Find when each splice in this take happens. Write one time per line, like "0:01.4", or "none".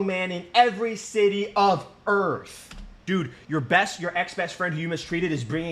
0:02.8